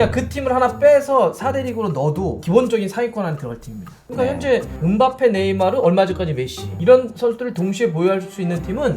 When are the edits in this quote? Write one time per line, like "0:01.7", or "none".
0:03.9
0:06.7